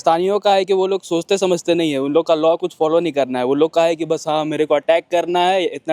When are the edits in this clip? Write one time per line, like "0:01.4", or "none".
none